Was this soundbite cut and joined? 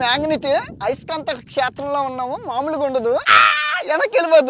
yes; 1 cut; at 3.4 s

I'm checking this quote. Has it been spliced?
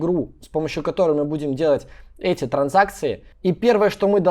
yes; 1 cut; at 3.3 s

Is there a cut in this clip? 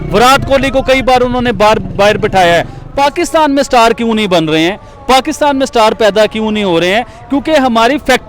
yes; 1 cut; at 2.8 s

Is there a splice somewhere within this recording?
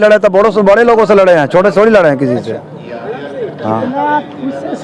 no; 0 cuts

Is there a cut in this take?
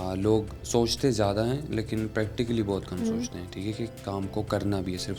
no; 0 cuts

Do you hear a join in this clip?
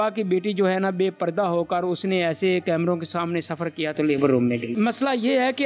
no; 0 cuts

